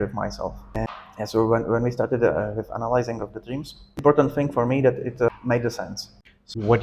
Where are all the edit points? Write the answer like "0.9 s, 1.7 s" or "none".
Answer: 0.9 s, 4.0 s, 5.7 s